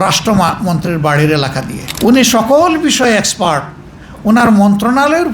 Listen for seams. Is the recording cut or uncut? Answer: cut